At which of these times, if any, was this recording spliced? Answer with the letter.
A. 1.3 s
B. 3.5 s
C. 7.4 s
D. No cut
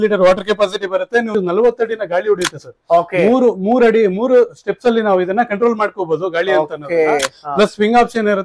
A